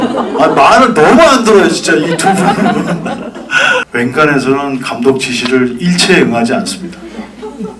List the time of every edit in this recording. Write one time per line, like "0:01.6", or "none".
0:03.9

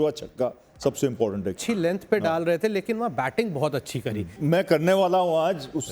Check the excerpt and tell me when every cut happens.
0:01.6
0:04.3

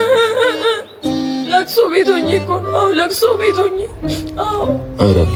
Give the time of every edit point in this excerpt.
none

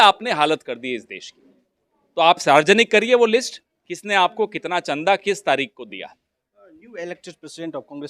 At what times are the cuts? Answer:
none

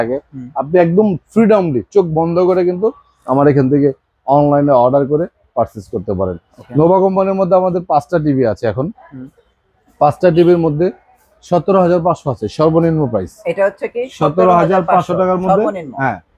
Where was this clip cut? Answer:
none

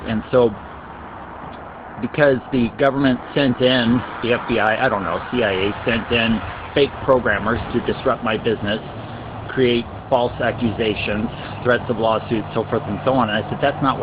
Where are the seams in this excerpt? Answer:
0:11.0

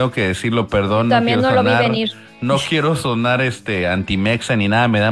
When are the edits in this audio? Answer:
none

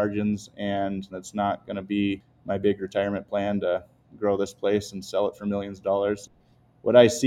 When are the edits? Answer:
0:01.1
0:02.3
0:06.3

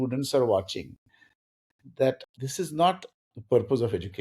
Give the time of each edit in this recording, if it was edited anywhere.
0:02.2

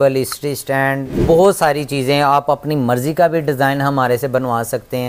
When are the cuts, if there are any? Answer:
0:01.1

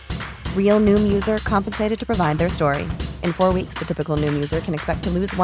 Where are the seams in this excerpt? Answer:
none

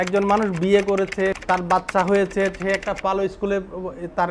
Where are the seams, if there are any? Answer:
0:01.4

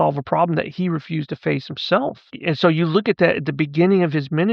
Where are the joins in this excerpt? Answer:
0:02.3

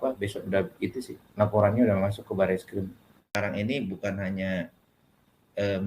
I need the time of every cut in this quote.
0:03.3

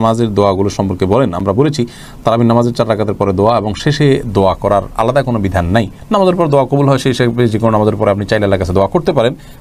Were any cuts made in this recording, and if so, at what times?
none

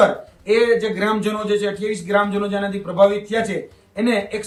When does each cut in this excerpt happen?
none

